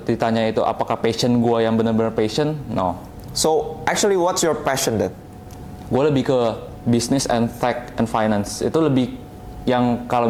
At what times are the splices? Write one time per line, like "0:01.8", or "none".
none

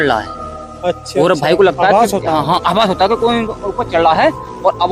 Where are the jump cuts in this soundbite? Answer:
none

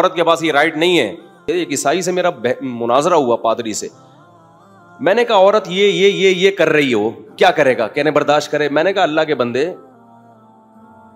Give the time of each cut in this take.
0:01.5

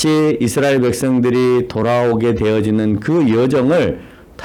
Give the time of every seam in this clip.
none

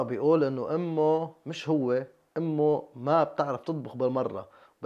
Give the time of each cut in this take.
none

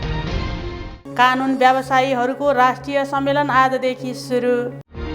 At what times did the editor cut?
none

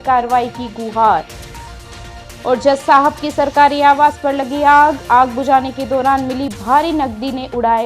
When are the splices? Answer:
none

